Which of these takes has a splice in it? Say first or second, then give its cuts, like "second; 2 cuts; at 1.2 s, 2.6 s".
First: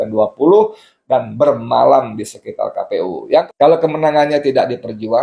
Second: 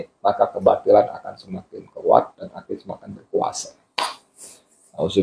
first; 1 cut; at 3.5 s